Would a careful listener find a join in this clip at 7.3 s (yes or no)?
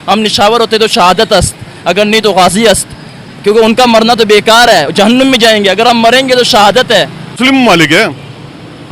yes